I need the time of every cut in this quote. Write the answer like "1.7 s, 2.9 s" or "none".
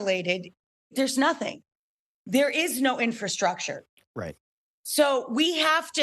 0.9 s